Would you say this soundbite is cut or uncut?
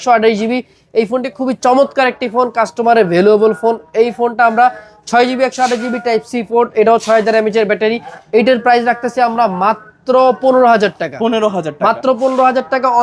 uncut